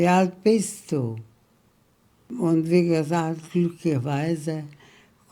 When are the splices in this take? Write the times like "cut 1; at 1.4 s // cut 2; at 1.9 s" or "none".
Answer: cut 1; at 2.3 s

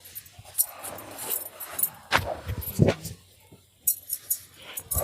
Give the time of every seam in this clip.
none

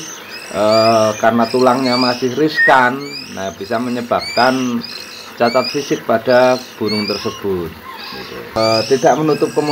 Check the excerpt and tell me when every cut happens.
cut 1; at 8.6 s

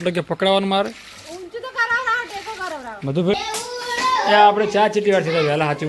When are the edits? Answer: cut 1; at 3.3 s

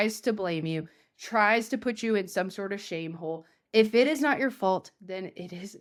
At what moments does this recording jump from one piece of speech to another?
none

